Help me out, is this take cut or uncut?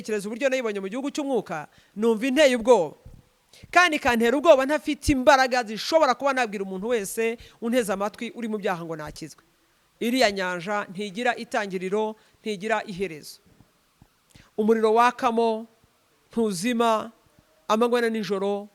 uncut